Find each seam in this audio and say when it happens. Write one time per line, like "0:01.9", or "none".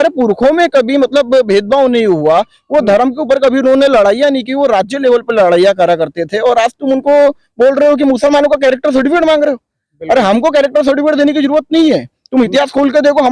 none